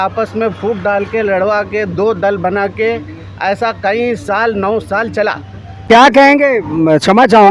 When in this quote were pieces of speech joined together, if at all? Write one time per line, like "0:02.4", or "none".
0:05.8